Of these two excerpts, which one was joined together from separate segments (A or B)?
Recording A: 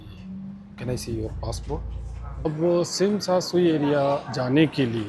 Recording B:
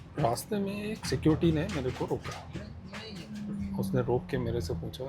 A